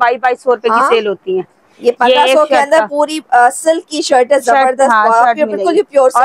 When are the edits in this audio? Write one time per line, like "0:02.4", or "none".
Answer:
none